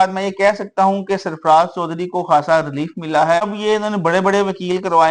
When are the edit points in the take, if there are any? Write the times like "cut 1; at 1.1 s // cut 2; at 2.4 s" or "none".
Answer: cut 1; at 3.4 s